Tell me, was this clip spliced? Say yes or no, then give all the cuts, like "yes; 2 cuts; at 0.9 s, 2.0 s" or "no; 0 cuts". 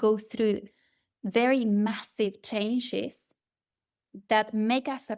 no; 0 cuts